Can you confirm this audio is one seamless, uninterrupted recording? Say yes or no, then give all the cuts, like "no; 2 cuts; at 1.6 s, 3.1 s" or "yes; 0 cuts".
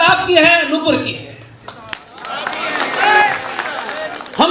yes; 0 cuts